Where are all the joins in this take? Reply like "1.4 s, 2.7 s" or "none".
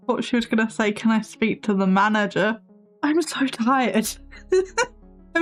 none

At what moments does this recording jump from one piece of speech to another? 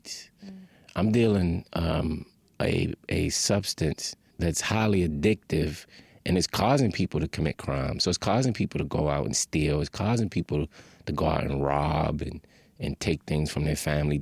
4.2 s

